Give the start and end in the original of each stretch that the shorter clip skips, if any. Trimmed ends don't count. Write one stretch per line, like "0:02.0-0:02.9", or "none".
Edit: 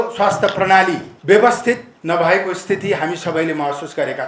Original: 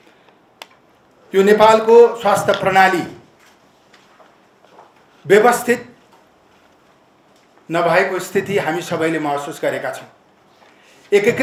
0:03.2-0:05.1
0:05.9-0:07.6